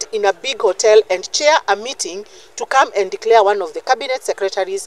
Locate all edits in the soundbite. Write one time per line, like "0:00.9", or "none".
none